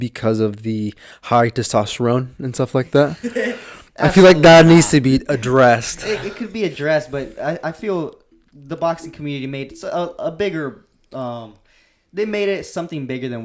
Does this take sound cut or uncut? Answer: uncut